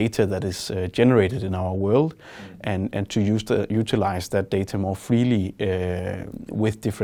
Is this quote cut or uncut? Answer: uncut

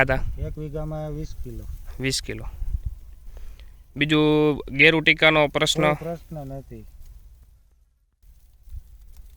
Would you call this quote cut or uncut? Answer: cut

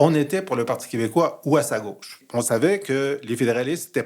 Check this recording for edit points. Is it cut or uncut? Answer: cut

